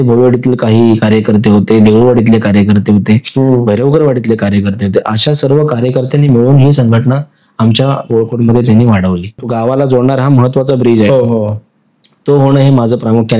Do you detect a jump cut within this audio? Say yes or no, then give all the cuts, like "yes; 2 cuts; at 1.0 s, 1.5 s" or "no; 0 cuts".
yes; 1 cut; at 9.4 s